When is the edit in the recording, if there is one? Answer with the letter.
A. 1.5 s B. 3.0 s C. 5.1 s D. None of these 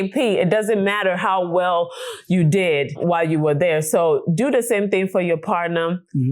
B